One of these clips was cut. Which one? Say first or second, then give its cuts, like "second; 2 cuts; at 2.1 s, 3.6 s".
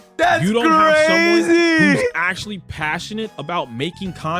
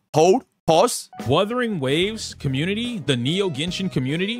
second; 1 cut; at 1.1 s